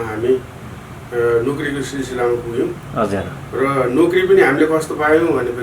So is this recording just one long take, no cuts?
yes; 0 cuts

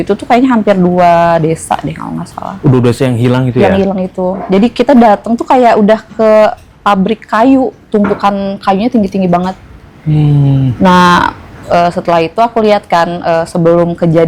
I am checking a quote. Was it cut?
no; 0 cuts

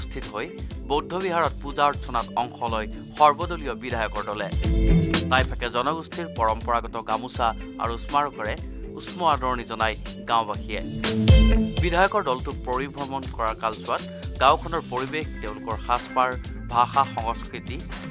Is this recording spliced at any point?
no; 0 cuts

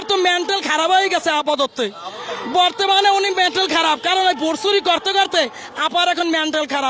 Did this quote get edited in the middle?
no; 0 cuts

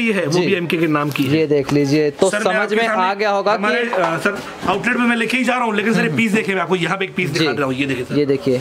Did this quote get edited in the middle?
no; 0 cuts

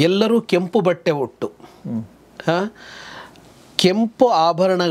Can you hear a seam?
no; 0 cuts

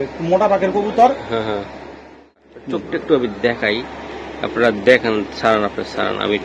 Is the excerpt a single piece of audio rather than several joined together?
no; 1 cut; at 2.4 s

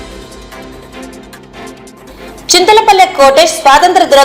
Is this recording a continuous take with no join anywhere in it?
yes; 0 cuts

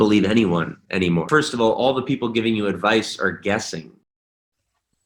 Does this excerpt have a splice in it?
yes; 1 cut; at 1.3 s

